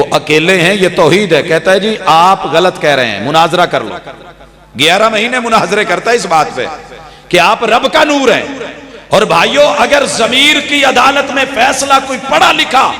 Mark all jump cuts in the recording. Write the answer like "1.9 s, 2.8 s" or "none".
none

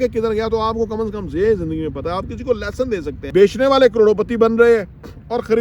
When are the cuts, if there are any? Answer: 3.2 s

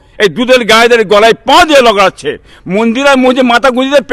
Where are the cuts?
2.5 s

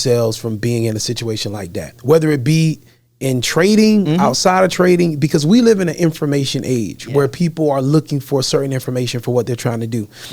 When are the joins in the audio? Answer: none

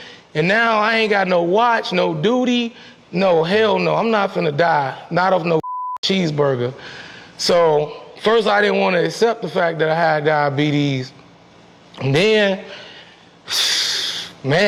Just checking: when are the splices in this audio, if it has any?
none

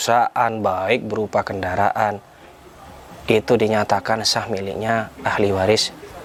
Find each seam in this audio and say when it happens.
none

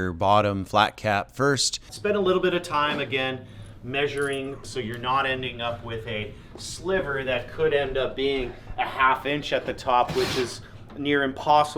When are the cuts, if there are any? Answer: 1.9 s, 4.6 s

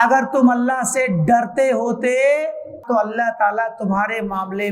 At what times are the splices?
2.8 s

